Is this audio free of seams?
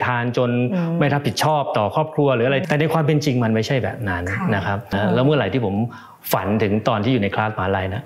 no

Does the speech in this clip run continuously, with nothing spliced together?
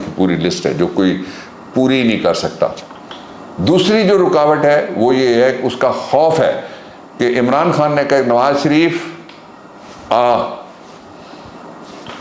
yes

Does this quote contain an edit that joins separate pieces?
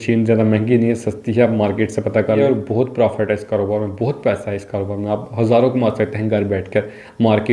yes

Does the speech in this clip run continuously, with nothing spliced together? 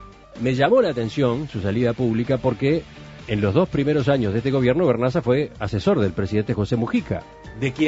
yes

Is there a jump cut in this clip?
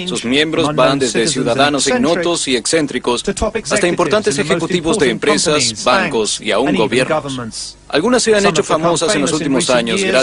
yes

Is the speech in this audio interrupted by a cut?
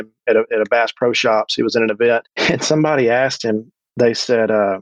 yes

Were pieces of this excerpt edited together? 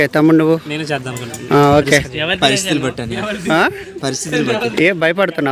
yes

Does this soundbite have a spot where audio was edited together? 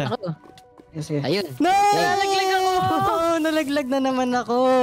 no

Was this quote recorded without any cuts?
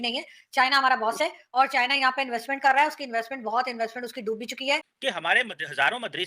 no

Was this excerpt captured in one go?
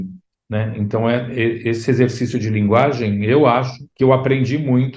no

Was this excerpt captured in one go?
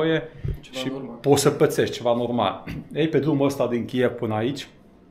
yes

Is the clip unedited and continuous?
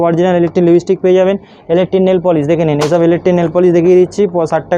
yes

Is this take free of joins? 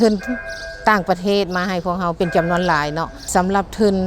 no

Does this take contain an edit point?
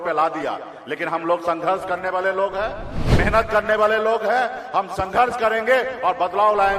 no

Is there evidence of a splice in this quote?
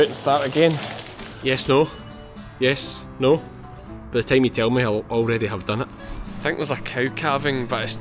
yes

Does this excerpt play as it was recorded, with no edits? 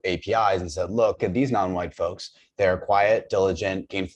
no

